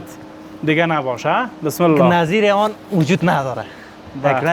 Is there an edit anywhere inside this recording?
no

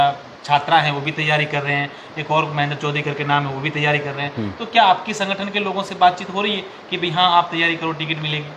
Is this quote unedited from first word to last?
yes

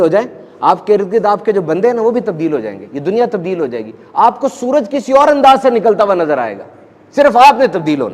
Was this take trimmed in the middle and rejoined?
no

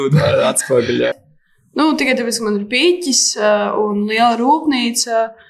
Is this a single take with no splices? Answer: no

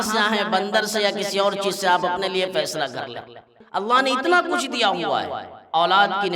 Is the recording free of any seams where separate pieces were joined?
no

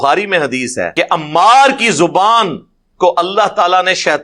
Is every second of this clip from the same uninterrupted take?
no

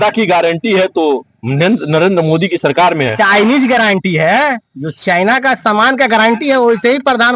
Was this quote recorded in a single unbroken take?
yes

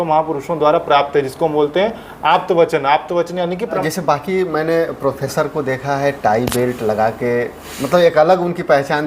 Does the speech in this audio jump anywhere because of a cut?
yes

